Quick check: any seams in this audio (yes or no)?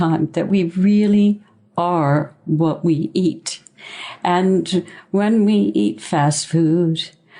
no